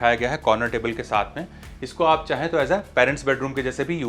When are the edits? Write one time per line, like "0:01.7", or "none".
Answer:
none